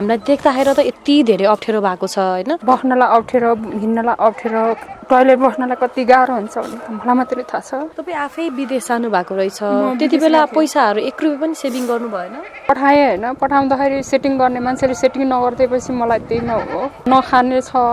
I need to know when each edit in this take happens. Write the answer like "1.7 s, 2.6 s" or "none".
2.6 s, 4.9 s, 7.9 s, 12.7 s, 17.1 s